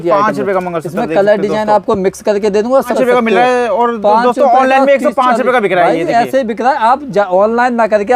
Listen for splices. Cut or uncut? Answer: cut